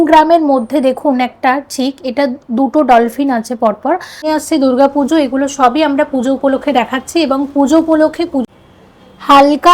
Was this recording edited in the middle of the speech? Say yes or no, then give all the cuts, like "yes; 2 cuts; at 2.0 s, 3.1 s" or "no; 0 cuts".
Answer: yes; 2 cuts; at 4.3 s, 8.4 s